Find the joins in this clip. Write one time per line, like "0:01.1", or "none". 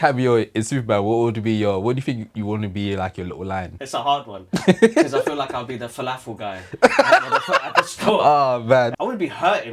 0:04.0
0:08.9